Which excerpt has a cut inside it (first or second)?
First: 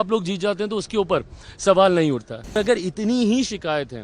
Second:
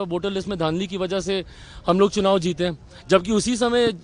first